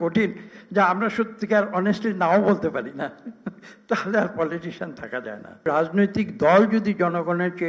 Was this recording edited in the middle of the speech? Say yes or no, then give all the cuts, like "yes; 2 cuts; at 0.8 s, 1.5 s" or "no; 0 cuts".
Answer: yes; 1 cut; at 5.6 s